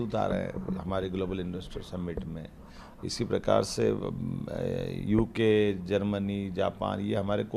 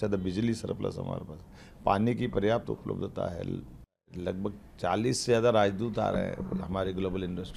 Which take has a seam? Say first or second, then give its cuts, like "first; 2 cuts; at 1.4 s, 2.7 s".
second; 1 cut; at 4.1 s